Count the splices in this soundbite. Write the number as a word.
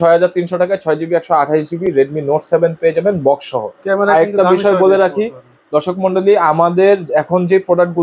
zero